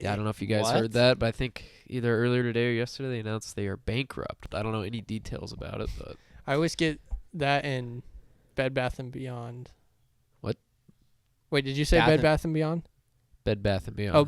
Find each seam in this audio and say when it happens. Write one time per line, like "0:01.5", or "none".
0:04.5